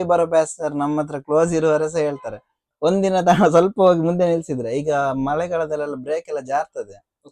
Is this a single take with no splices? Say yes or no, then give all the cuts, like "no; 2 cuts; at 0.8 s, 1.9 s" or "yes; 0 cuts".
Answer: yes; 0 cuts